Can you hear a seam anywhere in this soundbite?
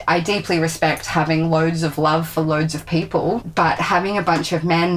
yes; 1 cut; at 3.5 s

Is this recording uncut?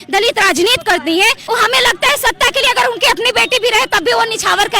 no; 1 cut; at 1.4 s

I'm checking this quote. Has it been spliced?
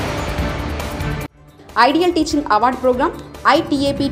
yes; 1 cut; at 1.3 s

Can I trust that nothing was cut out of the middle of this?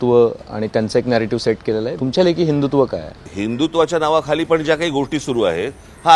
no; 2 cuts; at 1.9 s, 3.2 s

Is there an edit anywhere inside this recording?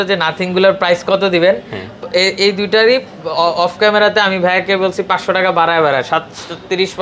no; 0 cuts

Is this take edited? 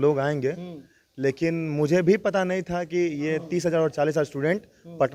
no; 0 cuts

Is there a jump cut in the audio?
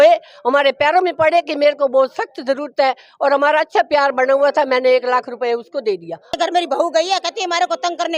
yes; 1 cut; at 6.4 s

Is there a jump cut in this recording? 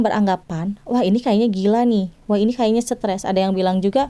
no; 0 cuts

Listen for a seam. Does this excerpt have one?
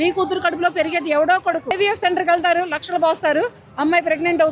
yes; 1 cut; at 1.7 s

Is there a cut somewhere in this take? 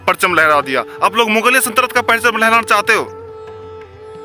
no; 0 cuts

